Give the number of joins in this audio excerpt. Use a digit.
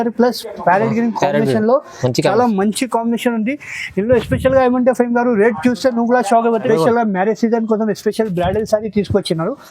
1